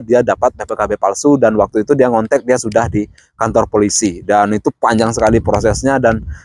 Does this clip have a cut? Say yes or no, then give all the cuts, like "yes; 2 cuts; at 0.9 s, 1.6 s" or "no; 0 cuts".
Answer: no; 0 cuts